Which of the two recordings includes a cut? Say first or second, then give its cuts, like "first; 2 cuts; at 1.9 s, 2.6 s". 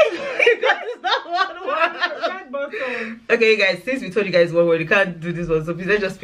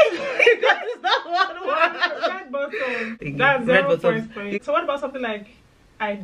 second; 2 cuts; at 3.2 s, 4.6 s